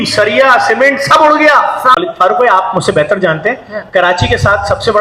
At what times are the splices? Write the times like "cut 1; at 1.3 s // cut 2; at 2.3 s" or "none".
cut 1; at 2.0 s